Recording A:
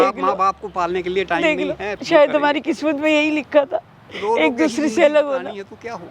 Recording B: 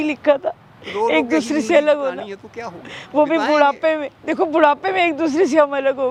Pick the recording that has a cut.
A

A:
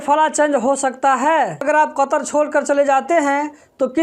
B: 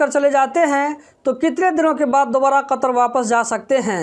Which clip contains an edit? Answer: A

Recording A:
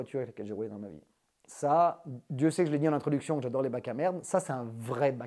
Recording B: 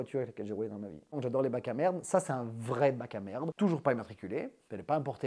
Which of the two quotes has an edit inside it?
B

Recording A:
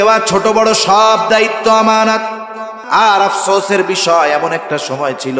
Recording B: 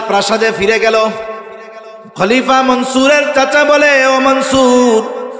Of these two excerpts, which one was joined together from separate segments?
A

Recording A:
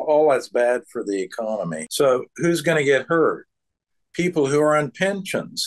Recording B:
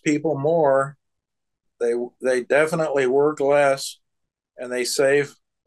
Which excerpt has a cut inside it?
A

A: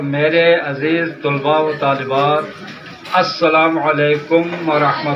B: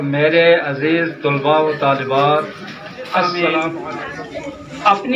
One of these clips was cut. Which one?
B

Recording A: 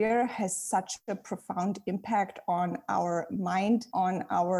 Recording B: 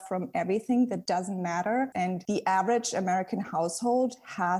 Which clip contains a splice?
B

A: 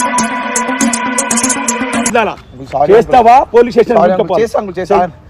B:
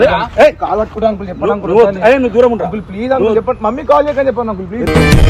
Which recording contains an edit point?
A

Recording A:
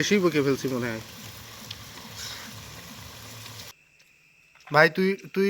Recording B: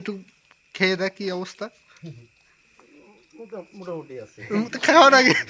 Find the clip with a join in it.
A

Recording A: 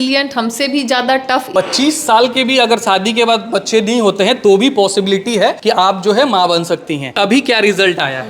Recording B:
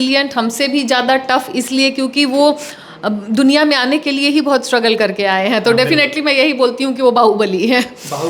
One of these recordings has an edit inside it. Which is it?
A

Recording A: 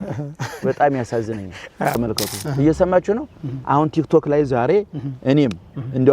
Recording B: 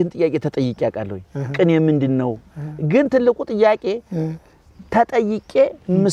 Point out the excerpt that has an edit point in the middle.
A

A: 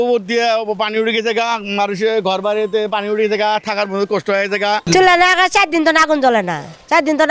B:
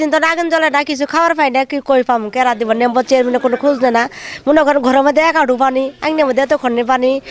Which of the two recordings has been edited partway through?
A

